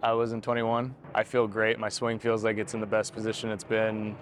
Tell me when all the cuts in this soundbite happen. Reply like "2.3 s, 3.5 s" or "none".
1.0 s